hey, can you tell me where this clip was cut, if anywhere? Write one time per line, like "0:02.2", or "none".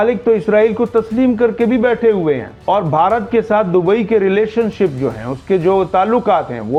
none